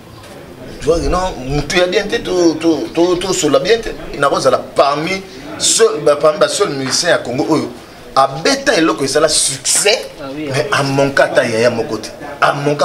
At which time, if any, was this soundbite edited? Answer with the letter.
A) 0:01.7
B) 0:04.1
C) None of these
B